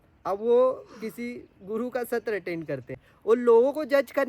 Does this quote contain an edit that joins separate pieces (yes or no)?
yes